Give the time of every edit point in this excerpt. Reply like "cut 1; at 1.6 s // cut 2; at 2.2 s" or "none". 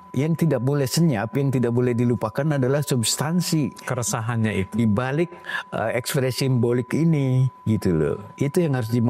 none